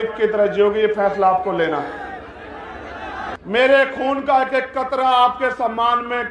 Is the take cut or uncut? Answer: cut